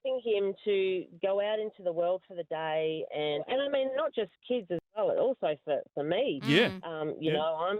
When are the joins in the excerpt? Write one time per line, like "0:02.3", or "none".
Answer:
0:03.5